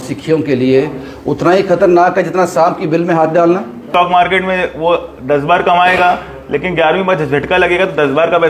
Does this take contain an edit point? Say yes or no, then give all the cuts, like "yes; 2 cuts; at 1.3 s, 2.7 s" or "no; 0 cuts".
yes; 1 cut; at 3.9 s